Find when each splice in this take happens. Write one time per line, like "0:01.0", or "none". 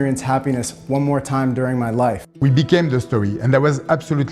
0:02.3